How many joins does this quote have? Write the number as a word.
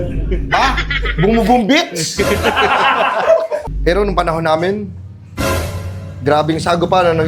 one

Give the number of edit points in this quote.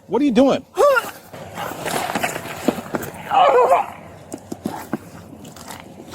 one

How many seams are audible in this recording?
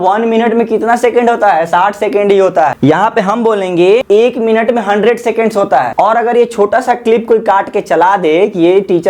three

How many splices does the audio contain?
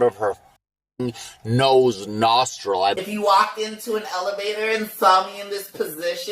one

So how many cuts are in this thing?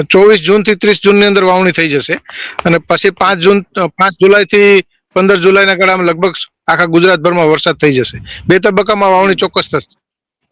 zero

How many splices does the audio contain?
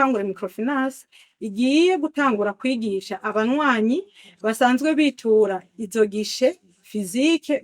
zero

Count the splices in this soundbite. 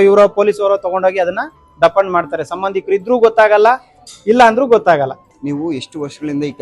one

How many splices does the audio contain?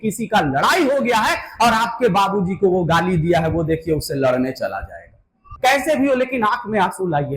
one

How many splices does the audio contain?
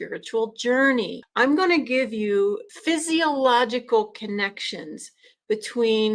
two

